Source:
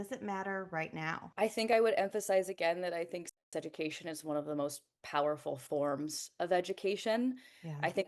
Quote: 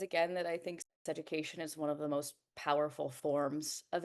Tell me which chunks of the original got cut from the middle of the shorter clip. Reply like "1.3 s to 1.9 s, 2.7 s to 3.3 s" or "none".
none